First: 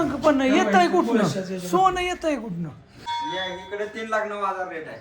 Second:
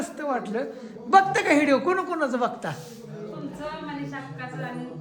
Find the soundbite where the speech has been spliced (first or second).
first